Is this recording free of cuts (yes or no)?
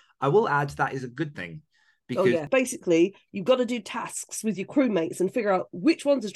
no